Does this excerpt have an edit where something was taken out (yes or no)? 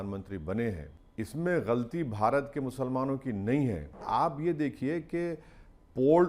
yes